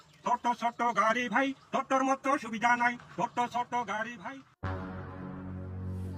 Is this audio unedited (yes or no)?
no